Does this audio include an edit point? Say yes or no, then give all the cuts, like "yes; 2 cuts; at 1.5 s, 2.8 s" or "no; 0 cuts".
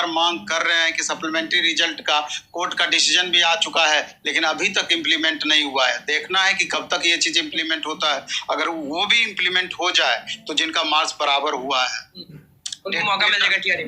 no; 0 cuts